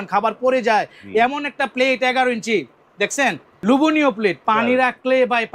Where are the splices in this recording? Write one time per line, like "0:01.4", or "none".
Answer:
0:03.5
0:04.4